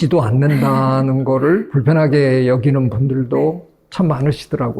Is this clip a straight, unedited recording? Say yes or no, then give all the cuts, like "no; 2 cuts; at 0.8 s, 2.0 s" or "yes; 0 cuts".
no; 1 cut; at 1.7 s